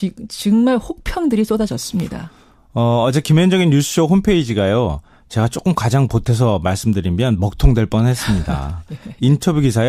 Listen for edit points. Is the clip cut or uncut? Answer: cut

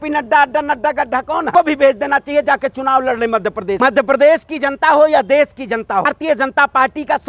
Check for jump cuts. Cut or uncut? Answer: cut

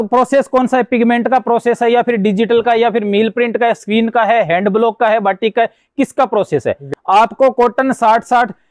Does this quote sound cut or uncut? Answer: cut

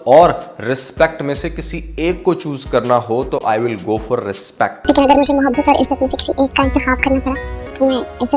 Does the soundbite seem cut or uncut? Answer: uncut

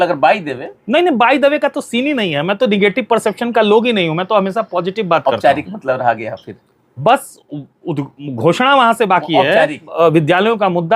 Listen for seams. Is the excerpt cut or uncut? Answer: cut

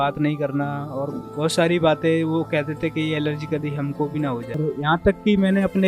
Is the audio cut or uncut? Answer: cut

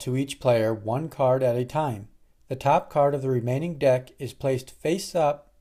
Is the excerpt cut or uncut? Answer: uncut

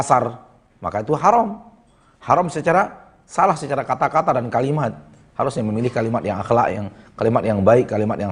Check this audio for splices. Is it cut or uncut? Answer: uncut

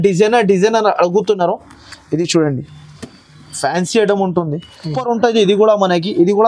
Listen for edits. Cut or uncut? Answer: cut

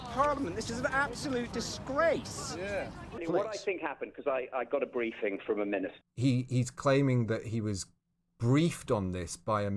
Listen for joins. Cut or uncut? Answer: cut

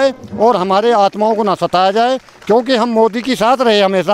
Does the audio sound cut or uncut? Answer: uncut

